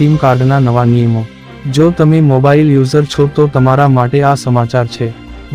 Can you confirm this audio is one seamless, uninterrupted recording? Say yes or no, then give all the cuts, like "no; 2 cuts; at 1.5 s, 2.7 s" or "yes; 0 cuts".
yes; 0 cuts